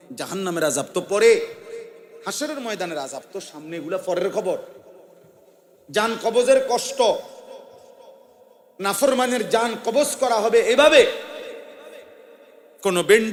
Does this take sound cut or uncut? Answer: uncut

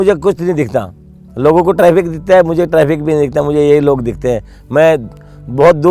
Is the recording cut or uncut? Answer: uncut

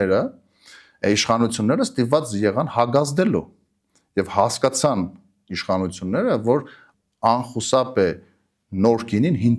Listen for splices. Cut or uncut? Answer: cut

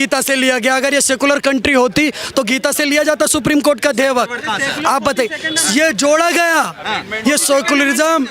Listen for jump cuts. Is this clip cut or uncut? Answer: uncut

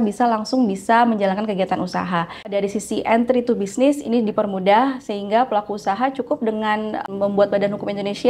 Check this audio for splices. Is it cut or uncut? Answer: cut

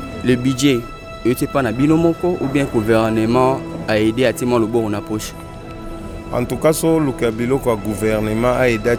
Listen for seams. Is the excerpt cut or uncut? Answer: uncut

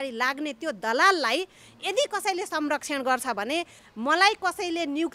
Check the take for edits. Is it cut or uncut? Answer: cut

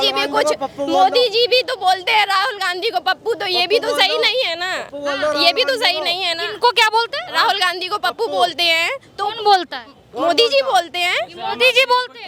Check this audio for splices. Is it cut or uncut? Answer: uncut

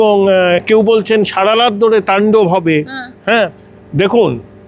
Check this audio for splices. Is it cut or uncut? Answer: uncut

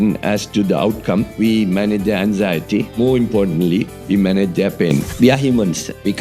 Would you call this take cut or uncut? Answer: cut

